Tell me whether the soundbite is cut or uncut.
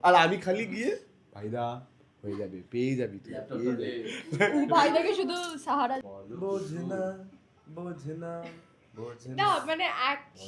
cut